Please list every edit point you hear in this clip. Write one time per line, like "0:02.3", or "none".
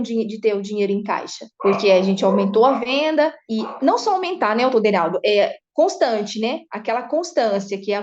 0:01.5
0:02.8